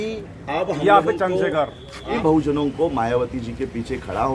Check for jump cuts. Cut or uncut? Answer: cut